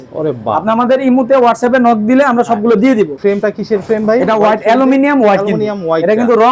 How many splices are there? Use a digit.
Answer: 1